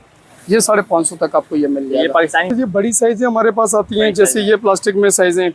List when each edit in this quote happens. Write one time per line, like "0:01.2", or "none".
0:02.5